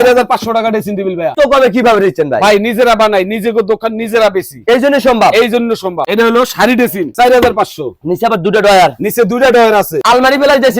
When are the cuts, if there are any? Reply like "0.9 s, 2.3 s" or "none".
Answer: 1.3 s, 6.0 s, 7.1 s, 10.0 s